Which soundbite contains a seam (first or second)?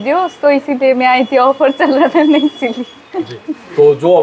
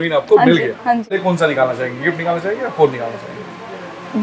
second